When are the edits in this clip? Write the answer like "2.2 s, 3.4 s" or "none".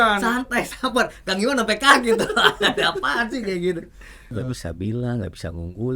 4.3 s